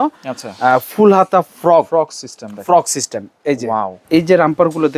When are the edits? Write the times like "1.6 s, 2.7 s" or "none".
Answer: 4.0 s